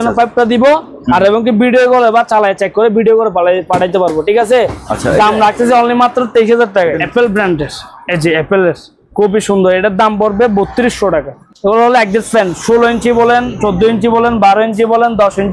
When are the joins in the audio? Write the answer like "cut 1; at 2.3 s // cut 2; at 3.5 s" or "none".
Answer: cut 1; at 7.0 s // cut 2; at 11.4 s